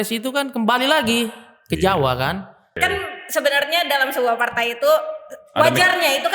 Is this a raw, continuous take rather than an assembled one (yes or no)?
no